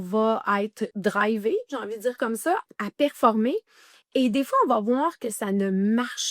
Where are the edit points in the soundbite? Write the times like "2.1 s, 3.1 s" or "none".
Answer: 0.9 s, 2.7 s